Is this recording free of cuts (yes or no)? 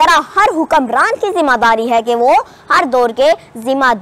yes